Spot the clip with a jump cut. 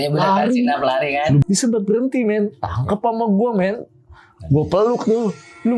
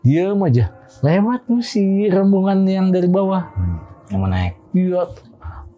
first; 1 cut; at 1.4 s

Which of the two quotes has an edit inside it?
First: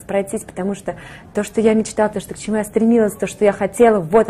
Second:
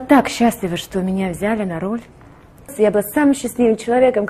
second; 1 cut; at 2.7 s

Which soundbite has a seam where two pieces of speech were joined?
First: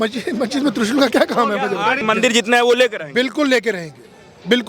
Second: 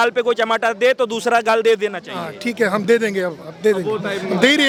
first; 1 cut; at 2.0 s

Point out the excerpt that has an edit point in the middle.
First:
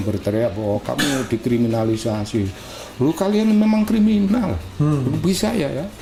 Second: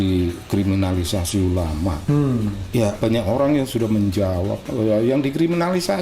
second; 2 cuts; at 2.0 s, 2.8 s

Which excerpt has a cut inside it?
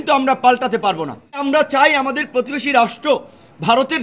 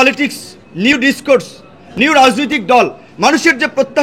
first; 1 cut; at 1.4 s

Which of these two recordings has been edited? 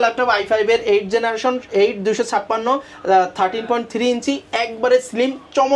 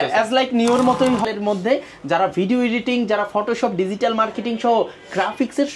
second; 1 cut; at 1.2 s

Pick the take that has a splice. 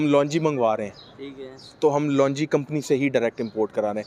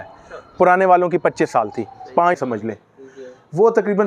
second; 1 cut; at 2.4 s

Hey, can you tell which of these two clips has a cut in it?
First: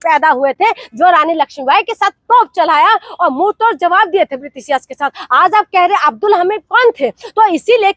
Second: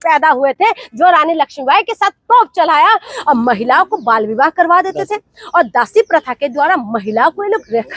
second; 1 cut; at 3.1 s

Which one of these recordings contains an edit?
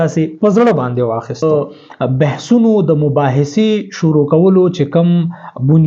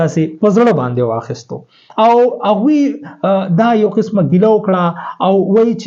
first; 1 cut; at 1.4 s

